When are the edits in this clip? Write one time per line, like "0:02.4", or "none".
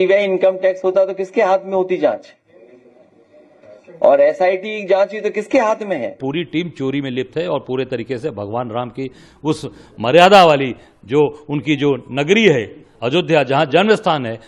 0:06.2